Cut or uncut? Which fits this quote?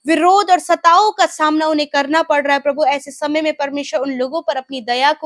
uncut